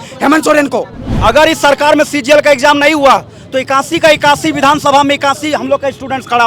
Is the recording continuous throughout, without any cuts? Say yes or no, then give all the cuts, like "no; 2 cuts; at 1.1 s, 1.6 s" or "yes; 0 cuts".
no; 1 cut; at 1.1 s